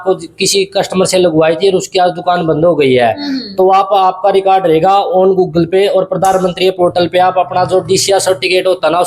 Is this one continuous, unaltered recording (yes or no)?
yes